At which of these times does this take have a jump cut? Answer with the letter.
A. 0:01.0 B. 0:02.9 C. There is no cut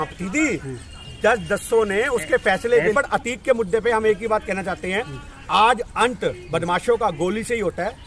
B